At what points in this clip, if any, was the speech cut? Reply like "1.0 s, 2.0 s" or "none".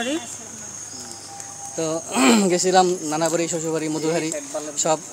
none